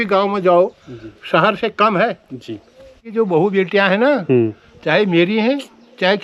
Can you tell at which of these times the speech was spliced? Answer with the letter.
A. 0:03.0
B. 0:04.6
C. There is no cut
A